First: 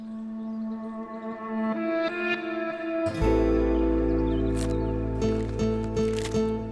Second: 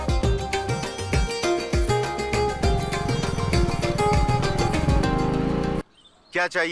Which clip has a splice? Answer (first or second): second